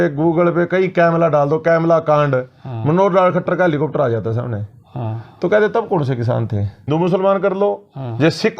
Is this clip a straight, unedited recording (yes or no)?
no